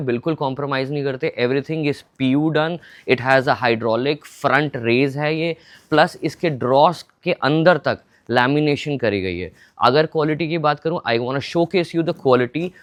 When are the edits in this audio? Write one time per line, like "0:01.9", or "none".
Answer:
none